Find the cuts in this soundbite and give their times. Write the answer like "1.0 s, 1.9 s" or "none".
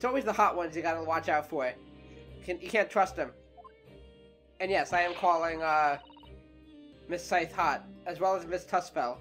none